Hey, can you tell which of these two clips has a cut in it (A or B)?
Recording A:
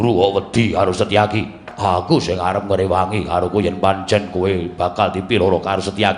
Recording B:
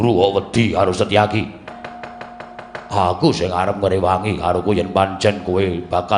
A